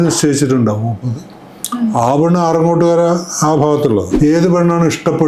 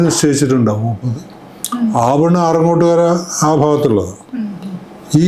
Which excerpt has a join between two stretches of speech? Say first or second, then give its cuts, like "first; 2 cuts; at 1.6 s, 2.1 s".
first; 1 cut; at 4.1 s